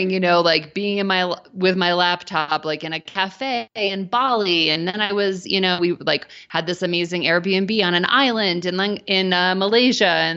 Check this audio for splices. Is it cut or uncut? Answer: uncut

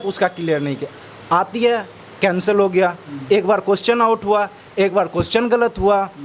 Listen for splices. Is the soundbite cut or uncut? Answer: uncut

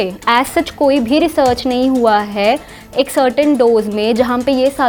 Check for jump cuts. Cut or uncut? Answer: uncut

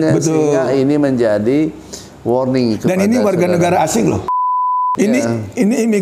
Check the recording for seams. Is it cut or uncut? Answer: cut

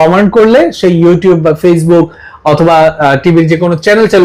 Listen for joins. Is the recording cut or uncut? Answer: uncut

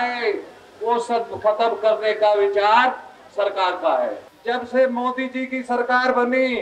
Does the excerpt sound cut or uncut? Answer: cut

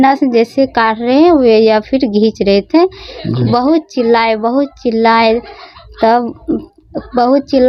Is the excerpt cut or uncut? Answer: uncut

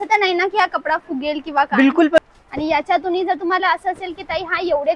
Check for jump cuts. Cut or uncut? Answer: cut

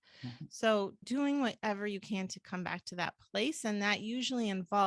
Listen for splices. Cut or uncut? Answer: cut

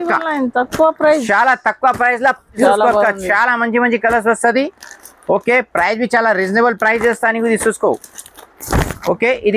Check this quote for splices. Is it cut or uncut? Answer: cut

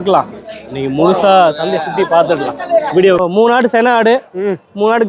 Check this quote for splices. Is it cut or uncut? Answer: cut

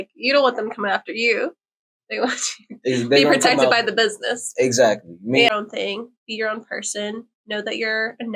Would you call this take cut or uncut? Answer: cut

